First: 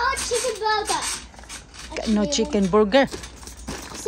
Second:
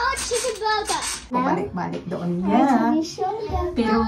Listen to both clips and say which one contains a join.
second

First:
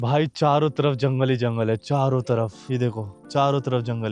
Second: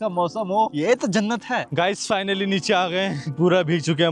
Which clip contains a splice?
second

